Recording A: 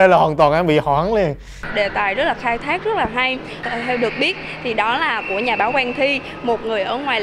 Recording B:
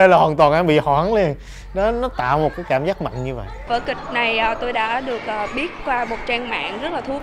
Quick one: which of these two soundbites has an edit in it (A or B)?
A